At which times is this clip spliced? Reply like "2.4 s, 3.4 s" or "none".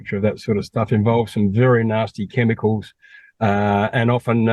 none